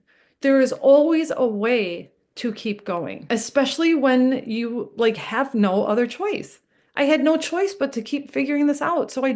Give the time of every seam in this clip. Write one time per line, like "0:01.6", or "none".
none